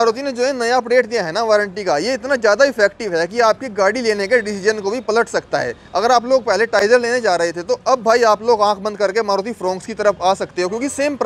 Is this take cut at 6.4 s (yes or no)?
no